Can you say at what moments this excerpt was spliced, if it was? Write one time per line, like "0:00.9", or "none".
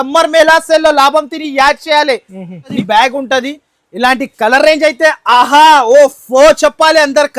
0:02.7